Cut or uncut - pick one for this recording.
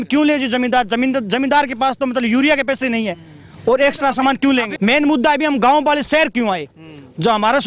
cut